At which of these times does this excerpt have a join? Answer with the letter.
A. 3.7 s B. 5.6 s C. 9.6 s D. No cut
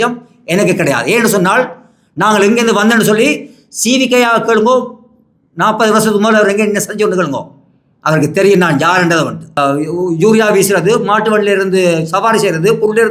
C